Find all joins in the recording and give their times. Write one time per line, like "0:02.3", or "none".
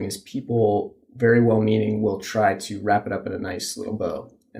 0:01.0